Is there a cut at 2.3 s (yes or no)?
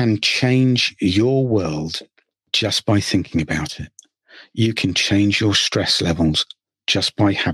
no